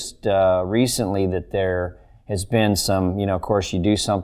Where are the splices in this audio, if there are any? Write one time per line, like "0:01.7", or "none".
none